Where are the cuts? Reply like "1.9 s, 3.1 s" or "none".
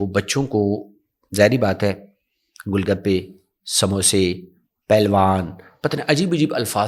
none